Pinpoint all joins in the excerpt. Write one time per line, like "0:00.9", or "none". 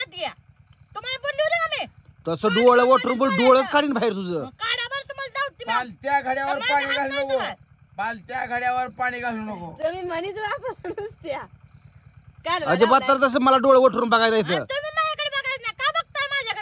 none